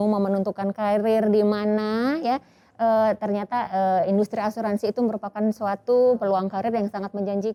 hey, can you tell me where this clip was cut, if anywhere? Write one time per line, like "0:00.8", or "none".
none